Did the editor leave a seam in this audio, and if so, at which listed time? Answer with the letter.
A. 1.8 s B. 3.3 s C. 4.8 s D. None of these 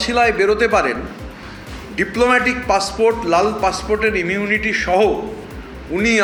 D